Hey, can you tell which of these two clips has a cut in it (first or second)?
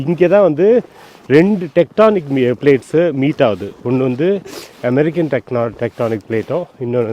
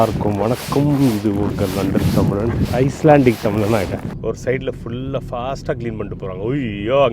second